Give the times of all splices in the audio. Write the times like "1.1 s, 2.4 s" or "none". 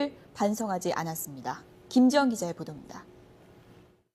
2.1 s